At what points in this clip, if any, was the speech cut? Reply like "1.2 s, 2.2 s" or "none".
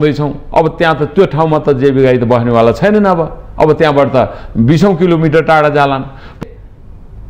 6.4 s